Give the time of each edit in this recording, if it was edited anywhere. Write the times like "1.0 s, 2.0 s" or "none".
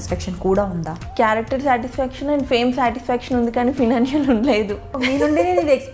1.0 s, 5.0 s